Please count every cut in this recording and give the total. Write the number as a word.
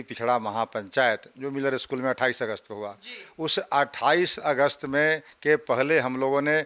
zero